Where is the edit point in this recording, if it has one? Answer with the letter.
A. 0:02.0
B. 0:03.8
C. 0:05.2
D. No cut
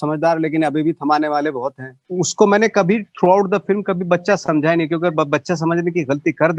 A